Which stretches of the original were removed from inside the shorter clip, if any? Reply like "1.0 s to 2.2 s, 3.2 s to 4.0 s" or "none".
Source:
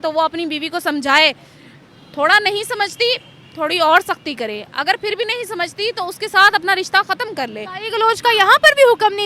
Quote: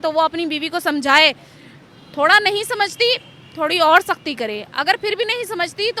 none